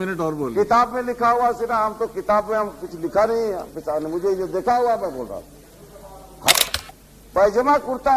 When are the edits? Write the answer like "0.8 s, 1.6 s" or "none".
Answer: 6.5 s